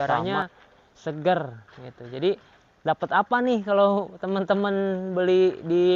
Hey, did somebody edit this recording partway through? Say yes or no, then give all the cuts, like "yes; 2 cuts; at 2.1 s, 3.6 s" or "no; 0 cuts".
no; 0 cuts